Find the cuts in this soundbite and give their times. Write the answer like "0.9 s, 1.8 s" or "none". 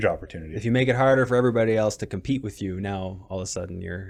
none